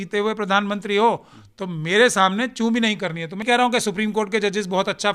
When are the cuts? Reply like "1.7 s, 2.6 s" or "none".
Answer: 3.4 s